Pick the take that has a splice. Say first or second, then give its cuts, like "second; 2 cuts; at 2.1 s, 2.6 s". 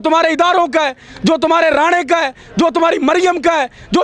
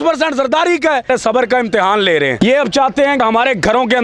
second; 3 cuts; at 1.1 s, 2.4 s, 3.2 s